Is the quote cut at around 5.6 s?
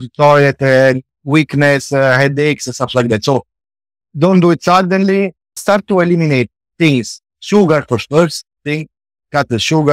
yes; 1 cut; at 5.6 s

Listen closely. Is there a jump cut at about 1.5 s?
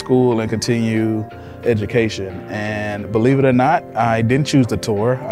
yes; 1 cut; at 1.5 s

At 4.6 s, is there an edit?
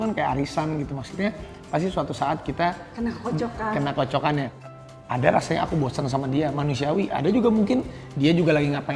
yes; 1 cut; at 4.6 s

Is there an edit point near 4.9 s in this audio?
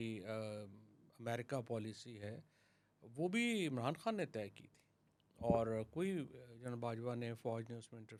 no; 0 cuts

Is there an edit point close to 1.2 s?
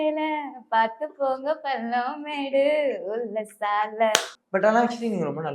no; 1 cut; at 4.3 s

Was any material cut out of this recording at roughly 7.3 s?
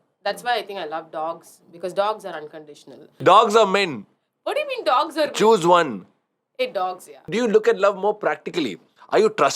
yes; 2 cuts; at 3.1 s, 7.3 s

